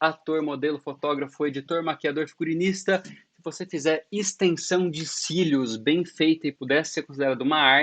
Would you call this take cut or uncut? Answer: cut